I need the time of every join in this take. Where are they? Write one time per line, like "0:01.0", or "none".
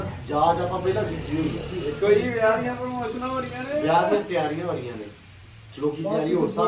none